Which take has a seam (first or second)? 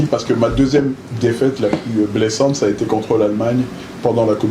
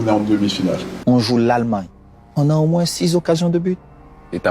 second